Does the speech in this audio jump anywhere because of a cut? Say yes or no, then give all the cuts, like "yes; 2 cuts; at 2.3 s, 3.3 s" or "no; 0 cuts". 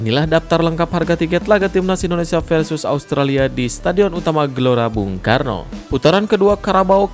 yes; 1 cut; at 5.7 s